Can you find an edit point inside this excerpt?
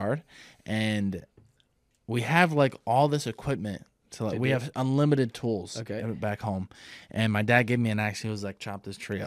no; 0 cuts

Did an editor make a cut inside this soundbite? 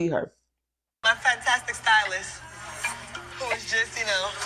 no; 0 cuts

